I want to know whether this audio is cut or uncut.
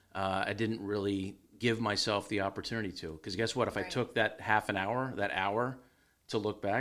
uncut